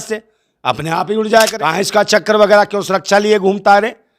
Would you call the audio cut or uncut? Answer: cut